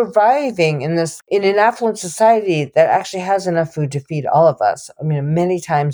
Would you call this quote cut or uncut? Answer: cut